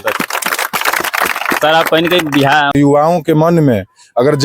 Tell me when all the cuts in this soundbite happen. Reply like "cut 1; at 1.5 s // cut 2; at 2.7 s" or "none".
cut 1; at 2.7 s